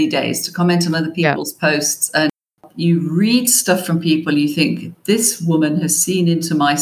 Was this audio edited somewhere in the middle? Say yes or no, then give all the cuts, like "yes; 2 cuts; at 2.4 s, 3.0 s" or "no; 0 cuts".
yes; 1 cut; at 2.5 s